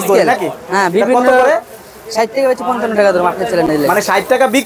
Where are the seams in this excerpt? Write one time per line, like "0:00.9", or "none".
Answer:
none